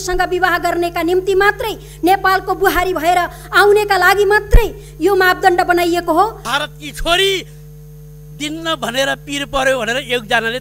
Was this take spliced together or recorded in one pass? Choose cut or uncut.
cut